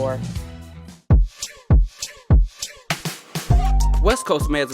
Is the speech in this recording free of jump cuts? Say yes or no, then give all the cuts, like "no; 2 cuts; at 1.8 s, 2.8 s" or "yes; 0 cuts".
no; 1 cut; at 1.0 s